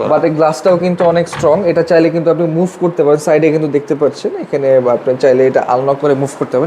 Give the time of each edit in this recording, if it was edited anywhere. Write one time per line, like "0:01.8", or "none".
none